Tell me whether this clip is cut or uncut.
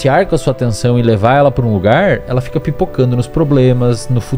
uncut